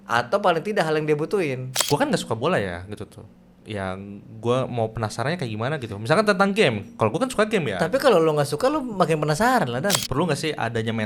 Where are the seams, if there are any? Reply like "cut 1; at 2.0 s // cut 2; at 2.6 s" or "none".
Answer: cut 1; at 1.7 s // cut 2; at 10.0 s